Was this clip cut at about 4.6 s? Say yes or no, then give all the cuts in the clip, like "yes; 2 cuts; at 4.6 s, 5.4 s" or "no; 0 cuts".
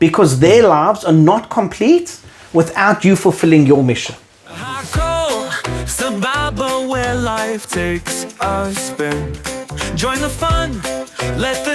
yes; 1 cut; at 4.6 s